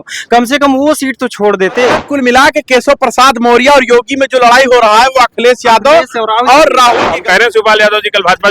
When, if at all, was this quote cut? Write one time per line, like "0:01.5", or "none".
0:02.0
0:07.1